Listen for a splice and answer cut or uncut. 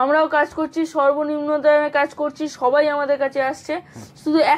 uncut